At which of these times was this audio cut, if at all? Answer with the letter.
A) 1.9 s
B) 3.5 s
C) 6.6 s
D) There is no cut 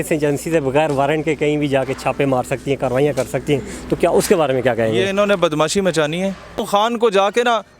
C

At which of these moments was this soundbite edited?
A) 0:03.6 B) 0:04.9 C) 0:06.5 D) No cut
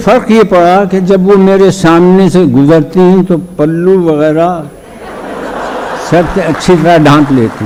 D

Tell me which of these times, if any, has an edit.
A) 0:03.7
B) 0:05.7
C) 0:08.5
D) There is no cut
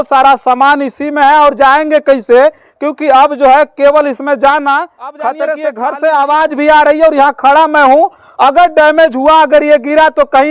B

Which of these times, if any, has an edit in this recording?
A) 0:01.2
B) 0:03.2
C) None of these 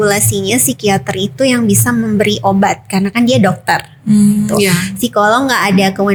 C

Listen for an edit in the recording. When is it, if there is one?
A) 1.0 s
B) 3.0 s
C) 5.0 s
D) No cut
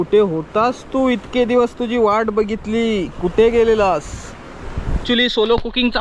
C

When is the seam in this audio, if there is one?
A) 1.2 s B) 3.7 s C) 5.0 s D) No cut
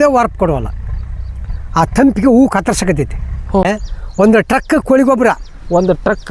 B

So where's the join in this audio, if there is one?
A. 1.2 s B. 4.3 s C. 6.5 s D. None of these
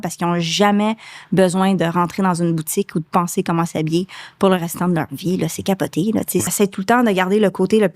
C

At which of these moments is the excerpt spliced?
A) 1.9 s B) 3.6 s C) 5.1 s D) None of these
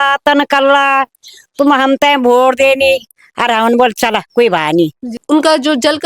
C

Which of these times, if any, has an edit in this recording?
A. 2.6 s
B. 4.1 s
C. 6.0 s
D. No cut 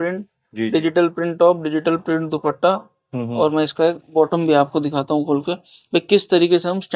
D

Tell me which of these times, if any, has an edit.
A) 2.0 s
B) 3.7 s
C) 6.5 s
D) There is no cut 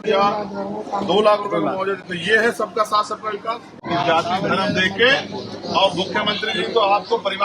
B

